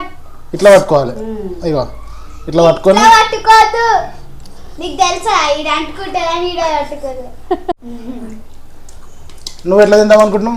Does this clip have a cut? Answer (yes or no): yes